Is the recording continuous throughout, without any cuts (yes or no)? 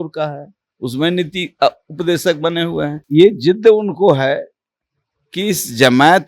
no